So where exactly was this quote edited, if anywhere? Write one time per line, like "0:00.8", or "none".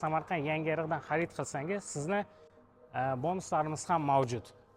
none